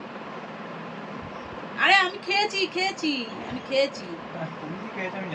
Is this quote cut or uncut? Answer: uncut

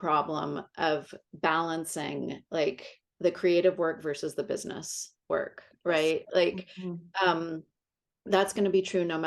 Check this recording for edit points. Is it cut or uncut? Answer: uncut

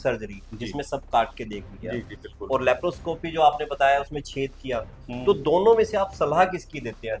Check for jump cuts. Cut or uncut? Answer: uncut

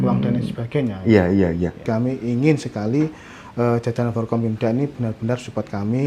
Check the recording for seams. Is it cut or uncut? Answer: cut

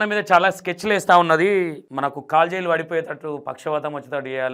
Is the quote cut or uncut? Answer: uncut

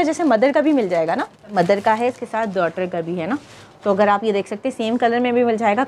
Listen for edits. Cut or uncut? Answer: cut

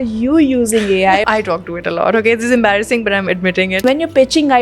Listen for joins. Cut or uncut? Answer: cut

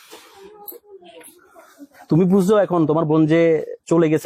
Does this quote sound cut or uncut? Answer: uncut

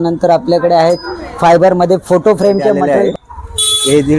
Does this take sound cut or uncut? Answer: cut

